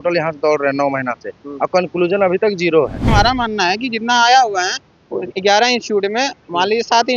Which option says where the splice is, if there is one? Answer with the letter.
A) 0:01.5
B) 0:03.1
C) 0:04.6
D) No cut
B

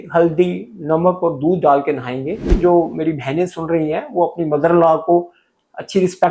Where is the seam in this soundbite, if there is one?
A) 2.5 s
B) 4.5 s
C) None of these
A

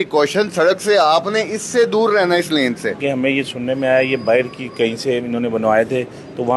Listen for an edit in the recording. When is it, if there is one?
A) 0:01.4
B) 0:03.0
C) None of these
B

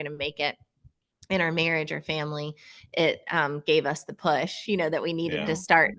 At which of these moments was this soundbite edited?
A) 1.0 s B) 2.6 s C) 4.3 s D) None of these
D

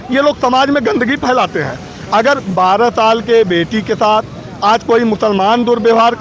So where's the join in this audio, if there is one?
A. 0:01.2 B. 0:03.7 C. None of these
C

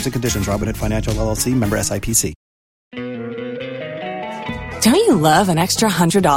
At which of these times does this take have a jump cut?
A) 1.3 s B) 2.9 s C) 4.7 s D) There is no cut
B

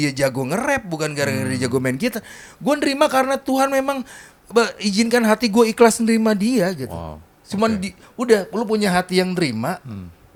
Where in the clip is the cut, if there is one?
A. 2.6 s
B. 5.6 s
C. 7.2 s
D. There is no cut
D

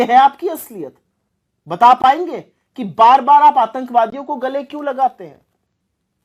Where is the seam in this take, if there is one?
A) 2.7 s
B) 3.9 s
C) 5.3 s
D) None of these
D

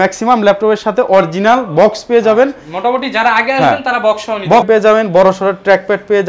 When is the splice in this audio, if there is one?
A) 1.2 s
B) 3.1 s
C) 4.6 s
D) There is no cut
C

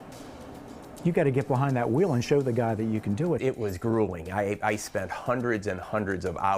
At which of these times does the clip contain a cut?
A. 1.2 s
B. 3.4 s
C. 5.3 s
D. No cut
B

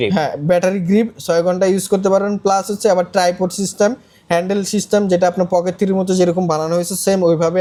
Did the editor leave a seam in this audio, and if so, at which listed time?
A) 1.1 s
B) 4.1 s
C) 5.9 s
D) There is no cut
D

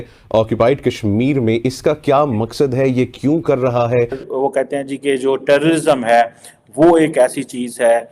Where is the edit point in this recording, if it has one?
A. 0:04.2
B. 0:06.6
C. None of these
A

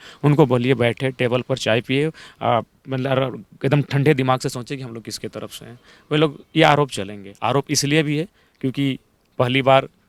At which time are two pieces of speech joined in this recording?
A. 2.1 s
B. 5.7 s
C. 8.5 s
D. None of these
D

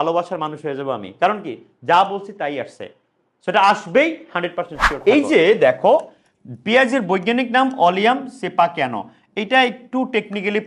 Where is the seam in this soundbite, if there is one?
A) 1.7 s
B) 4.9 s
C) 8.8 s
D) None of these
B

